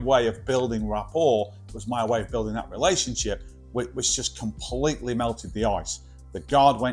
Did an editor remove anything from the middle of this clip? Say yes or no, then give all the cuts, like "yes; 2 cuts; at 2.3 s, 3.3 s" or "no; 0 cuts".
no; 0 cuts